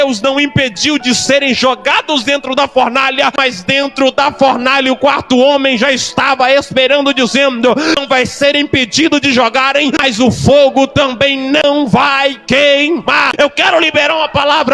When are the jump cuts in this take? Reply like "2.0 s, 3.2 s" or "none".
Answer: 3.4 s, 8.0 s, 10.0 s, 11.6 s, 13.3 s